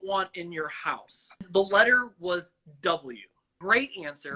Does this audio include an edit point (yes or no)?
yes